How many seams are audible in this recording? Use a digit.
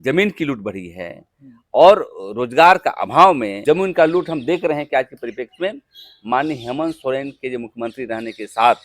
1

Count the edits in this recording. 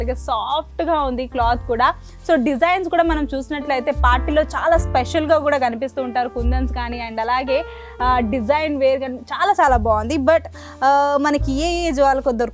0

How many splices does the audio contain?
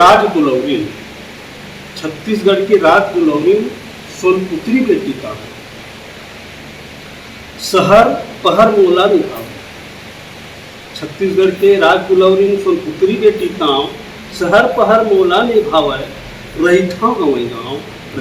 0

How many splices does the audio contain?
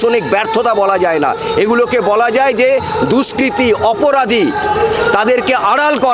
0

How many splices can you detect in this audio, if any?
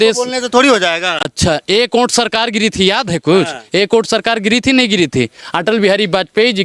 0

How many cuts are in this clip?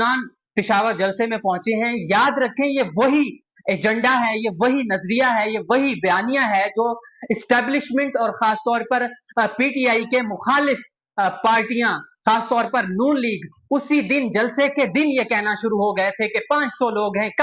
0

